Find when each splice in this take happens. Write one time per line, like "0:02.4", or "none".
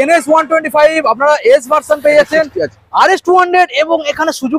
none